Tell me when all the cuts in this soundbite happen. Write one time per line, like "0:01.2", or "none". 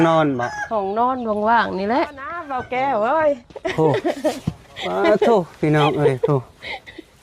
0:02.7